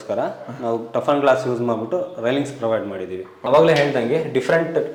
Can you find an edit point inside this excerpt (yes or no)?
no